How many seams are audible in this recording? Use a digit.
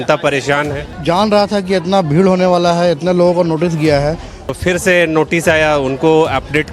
2